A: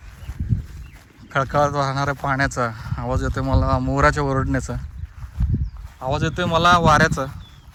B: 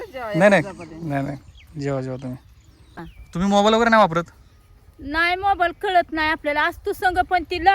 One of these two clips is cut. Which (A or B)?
B